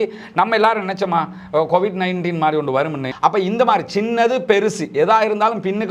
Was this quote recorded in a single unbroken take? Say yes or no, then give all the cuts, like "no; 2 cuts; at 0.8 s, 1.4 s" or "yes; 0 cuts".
no; 1 cut; at 3.0 s